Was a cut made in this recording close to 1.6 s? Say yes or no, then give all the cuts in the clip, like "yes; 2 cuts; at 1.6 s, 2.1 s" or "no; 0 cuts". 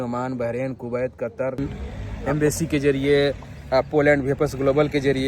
yes; 1 cut; at 1.6 s